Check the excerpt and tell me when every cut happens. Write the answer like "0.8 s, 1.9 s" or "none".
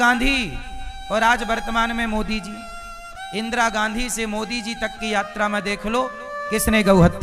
none